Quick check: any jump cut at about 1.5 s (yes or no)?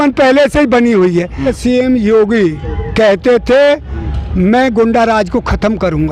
yes